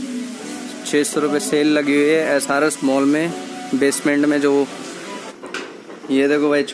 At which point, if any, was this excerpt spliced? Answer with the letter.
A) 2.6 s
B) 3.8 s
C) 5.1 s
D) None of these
C